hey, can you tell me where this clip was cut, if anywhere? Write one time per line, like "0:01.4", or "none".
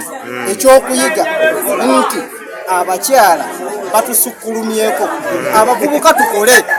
none